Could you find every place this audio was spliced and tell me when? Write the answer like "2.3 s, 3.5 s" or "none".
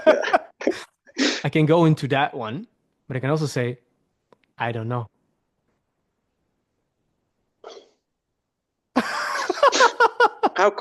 1.4 s